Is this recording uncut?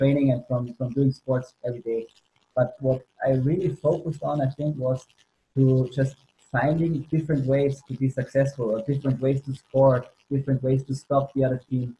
yes; 0 cuts

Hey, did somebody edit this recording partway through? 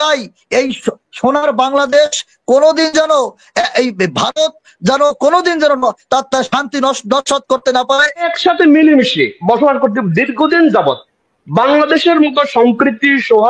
yes; 1 cut; at 8.3 s

